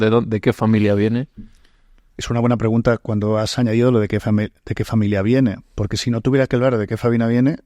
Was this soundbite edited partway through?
no; 0 cuts

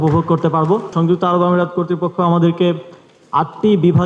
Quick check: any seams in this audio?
yes; 1 cut; at 0.9 s

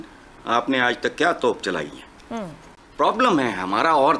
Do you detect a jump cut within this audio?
no; 0 cuts

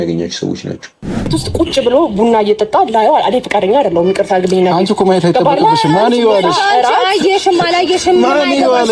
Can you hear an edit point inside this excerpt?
yes; 1 cut; at 1.3 s

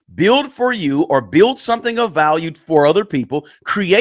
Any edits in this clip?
no; 0 cuts

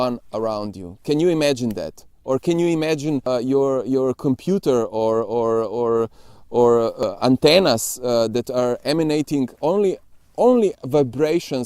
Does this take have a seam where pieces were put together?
yes; 2 cuts; at 3.2 s, 7.0 s

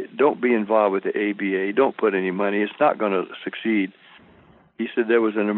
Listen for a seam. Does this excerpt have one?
no; 0 cuts

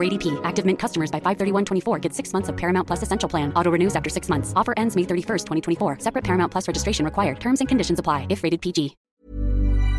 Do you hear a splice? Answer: yes; 1 cut; at 9.0 s

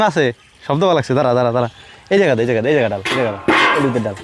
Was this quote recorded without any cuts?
yes; 0 cuts

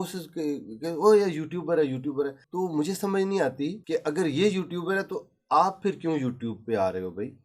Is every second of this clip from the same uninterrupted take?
no; 2 cuts; at 2.4 s, 3.8 s

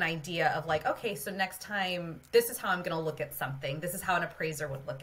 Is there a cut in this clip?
no; 0 cuts

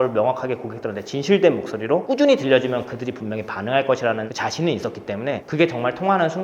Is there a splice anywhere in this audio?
yes; 1 cut; at 4.3 s

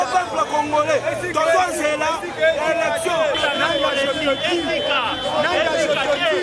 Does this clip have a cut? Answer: yes; 1 cut; at 3.3 s

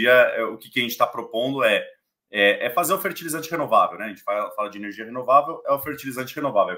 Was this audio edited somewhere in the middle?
no; 0 cuts

